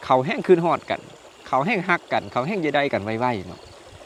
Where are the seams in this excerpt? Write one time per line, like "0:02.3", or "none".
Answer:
none

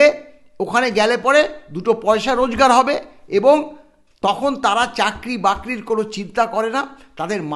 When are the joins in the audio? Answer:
none

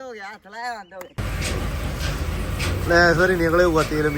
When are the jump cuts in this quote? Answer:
0:01.1

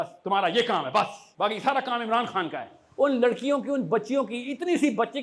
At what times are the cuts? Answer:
0:01.2
0:02.8

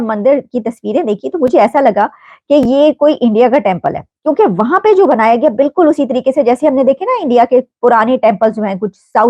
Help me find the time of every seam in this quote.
none

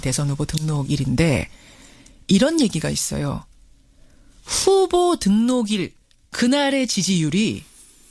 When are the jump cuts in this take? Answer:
none

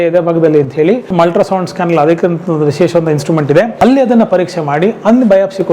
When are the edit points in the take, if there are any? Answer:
0:01.1
0:03.7

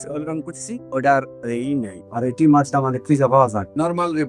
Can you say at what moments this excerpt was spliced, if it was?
none

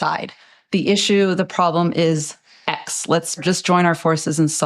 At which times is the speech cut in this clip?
0:03.4

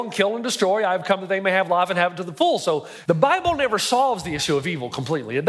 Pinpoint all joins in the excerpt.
0:02.9

